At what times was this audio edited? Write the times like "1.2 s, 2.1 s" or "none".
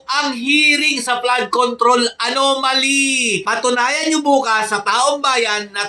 3.4 s

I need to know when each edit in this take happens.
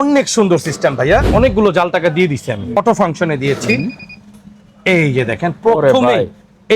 1.3 s, 2.7 s

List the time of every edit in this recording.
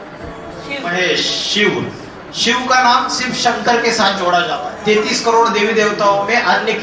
0.9 s, 4.6 s

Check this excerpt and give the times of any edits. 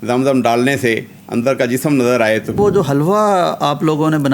2.6 s

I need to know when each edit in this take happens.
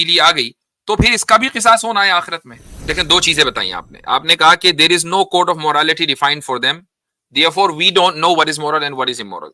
2.8 s

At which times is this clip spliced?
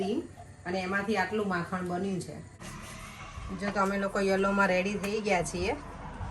2.7 s

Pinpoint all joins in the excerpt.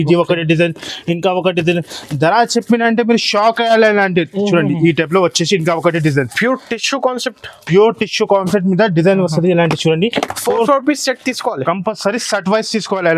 none

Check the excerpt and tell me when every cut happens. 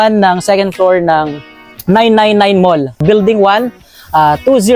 3.0 s

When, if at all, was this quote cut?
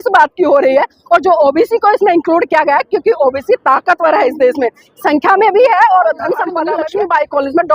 6.7 s

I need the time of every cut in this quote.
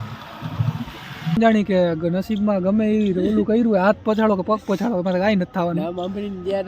1.4 s

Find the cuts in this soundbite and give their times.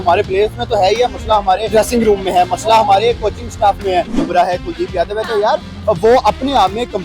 1.6 s, 4.2 s

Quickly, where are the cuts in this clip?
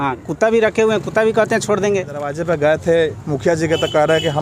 2.4 s

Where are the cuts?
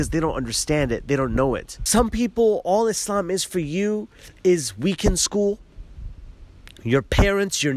1.7 s

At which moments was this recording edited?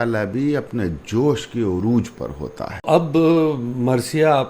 2.7 s

